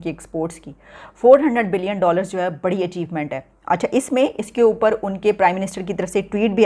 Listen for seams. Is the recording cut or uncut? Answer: uncut